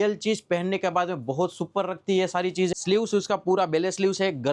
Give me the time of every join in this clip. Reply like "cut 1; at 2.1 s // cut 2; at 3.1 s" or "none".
cut 1; at 2.7 s

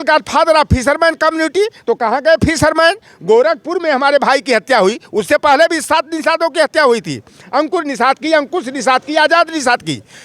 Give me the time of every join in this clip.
none

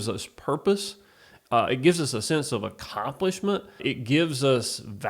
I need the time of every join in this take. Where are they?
cut 1; at 3.8 s

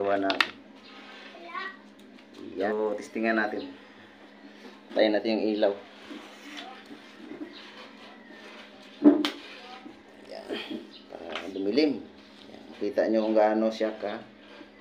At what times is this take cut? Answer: cut 1; at 2.7 s

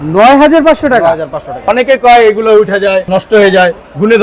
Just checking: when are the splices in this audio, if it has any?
cut 1; at 1.6 s // cut 2; at 3.1 s

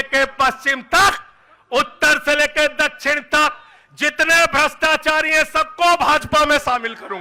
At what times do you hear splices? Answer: none

